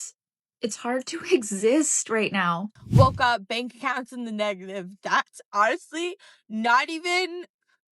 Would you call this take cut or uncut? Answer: cut